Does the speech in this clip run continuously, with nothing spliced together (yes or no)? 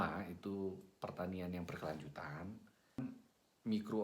no